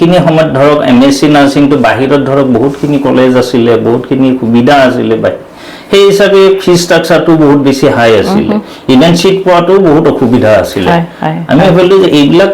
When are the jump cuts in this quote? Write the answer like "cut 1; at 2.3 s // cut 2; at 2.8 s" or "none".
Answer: none